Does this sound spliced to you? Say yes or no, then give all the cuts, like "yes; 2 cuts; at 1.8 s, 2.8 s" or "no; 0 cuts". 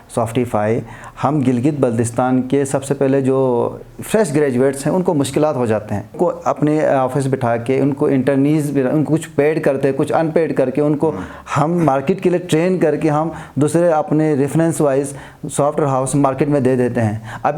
yes; 1 cut; at 6.1 s